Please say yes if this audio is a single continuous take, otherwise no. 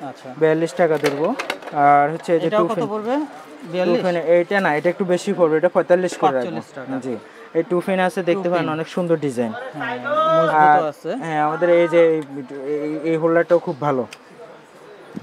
yes